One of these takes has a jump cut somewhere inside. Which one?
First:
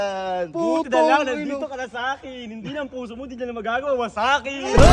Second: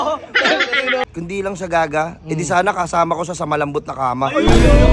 second; 1 cut; at 1.0 s

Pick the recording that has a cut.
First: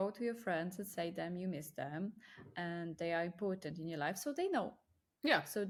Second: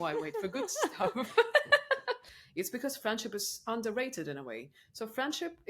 second; 1 cut; at 2.4 s

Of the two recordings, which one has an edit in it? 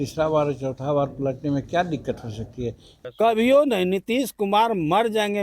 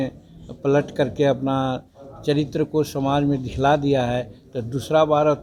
first; 1 cut; at 2.9 s

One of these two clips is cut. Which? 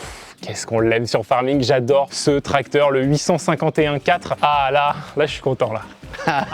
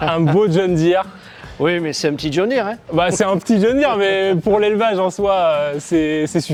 first; 1 cut; at 4.3 s

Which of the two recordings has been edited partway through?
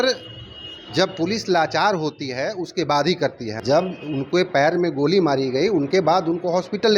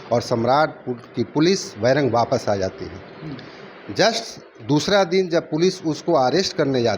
first; 1 cut; at 3.6 s

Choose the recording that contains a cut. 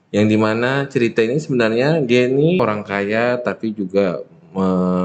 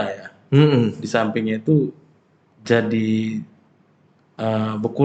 first; 1 cut; at 2.6 s

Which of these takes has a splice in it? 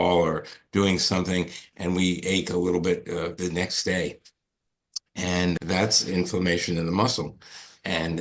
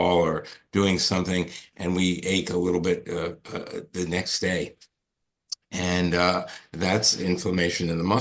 first; 2 cuts; at 3.3 s, 5.5 s

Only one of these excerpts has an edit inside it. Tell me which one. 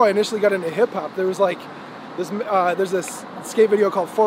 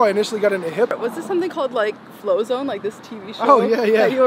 second; 1 cut; at 0.9 s

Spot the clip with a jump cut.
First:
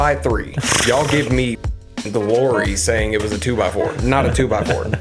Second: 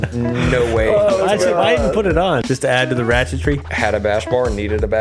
second; 2 cuts; at 2.4 s, 3.7 s

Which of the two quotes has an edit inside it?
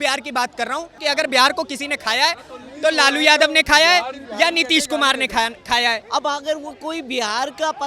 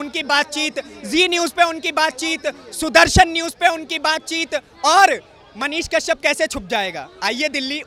first; 2 cuts; at 1.0 s, 6.0 s

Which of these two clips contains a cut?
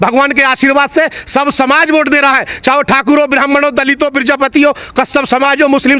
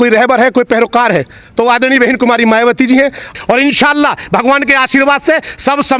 second; 1 cut; at 3.2 s

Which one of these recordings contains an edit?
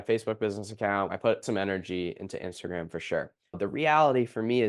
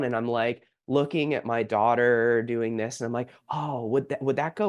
first; 2 cuts; at 1.1 s, 3.4 s

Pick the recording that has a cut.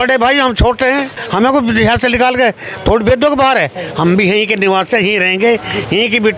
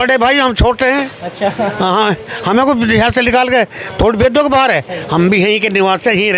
first; 1 cut; at 1.2 s

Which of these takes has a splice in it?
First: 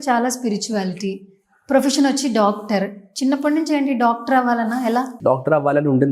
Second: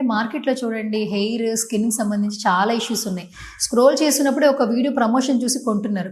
first; 1 cut; at 5.2 s

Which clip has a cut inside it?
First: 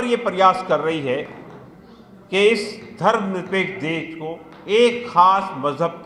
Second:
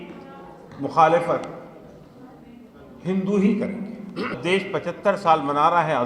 second; 1 cut; at 4.3 s

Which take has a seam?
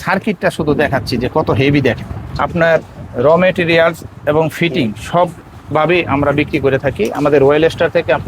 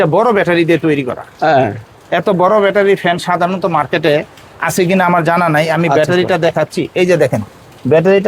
first; 1 cut; at 2.4 s

